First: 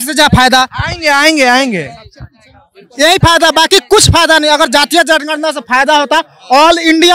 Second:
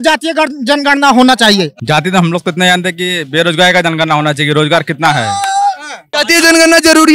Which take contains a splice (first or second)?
second